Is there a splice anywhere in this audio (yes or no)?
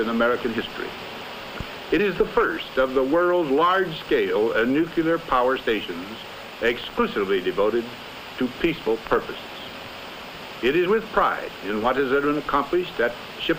no